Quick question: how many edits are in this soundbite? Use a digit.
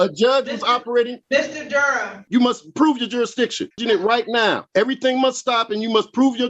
4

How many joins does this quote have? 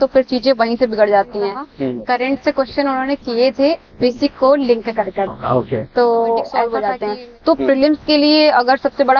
2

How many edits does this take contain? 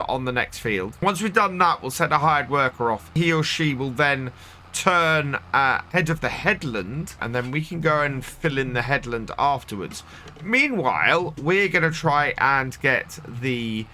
4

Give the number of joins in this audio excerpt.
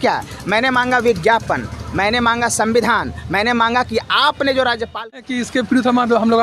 1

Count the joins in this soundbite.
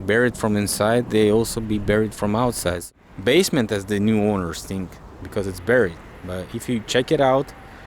1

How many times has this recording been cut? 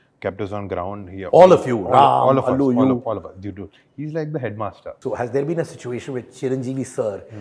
1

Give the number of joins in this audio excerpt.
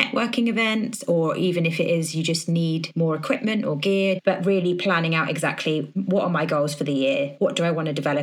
4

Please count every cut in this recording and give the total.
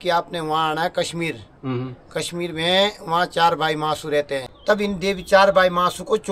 1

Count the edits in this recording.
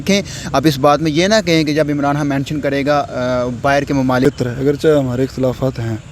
1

